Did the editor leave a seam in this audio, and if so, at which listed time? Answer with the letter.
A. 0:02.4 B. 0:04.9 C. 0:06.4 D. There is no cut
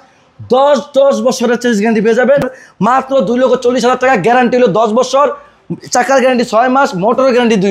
A